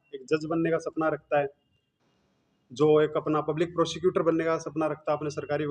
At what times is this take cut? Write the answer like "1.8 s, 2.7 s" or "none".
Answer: none